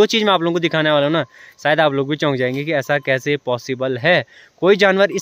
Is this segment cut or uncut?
uncut